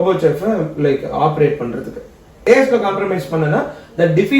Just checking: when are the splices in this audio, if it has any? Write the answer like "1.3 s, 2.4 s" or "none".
2.4 s